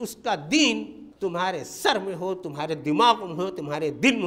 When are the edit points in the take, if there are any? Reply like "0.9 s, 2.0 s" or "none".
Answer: 1.0 s